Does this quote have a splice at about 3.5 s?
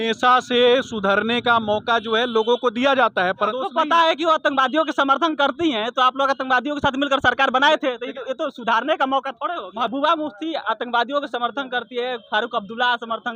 yes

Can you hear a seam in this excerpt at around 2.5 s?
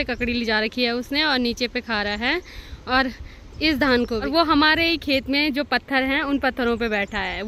no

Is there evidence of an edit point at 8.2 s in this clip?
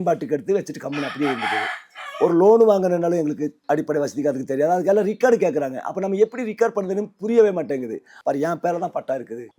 yes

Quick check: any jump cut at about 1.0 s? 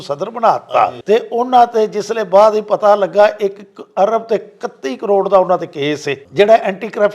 yes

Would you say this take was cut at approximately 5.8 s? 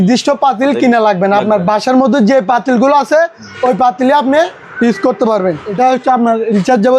yes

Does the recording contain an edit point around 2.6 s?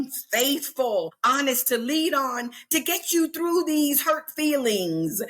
no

